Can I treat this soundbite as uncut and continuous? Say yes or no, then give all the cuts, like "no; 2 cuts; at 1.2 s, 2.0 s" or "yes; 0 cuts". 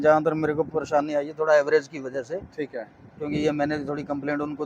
yes; 0 cuts